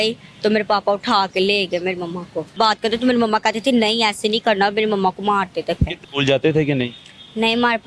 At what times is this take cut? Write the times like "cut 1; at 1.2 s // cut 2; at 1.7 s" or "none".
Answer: cut 1; at 2.5 s // cut 2; at 6.0 s